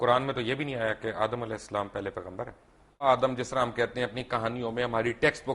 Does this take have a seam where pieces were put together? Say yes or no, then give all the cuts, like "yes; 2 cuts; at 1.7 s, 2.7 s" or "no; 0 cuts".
yes; 1 cut; at 3.0 s